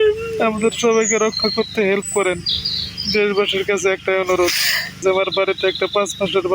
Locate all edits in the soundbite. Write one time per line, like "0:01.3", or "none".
0:05.0